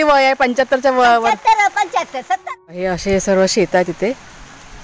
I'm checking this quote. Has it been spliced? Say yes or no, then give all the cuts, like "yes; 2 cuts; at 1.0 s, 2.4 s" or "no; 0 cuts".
yes; 1 cut; at 2.8 s